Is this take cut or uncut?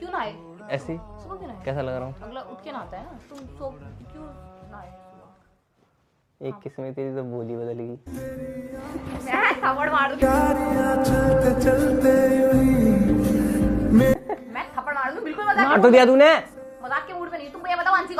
uncut